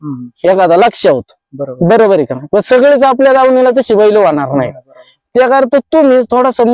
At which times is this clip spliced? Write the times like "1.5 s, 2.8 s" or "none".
none